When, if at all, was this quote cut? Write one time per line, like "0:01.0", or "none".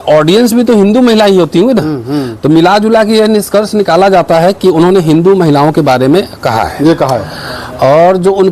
none